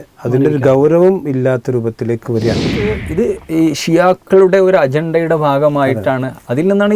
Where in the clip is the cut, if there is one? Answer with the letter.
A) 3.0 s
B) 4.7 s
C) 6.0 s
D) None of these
A